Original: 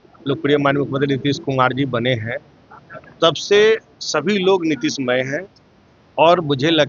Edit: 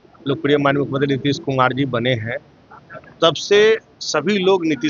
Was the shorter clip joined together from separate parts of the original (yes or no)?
no